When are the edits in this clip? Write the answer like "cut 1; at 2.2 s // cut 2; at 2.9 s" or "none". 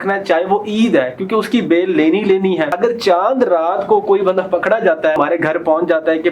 cut 1; at 2.7 s // cut 2; at 5.2 s